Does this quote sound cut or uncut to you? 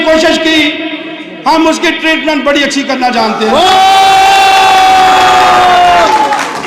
uncut